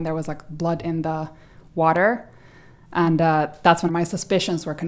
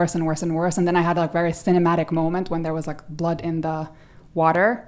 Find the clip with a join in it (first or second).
first